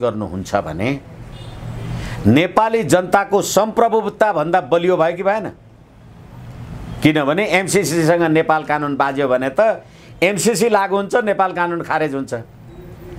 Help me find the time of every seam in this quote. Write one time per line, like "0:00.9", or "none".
none

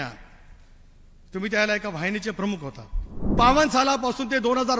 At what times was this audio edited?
0:03.4

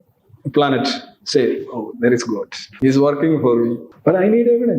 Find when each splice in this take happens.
0:02.6
0:03.9

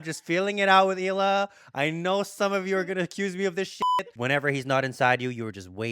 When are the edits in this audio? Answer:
0:03.9

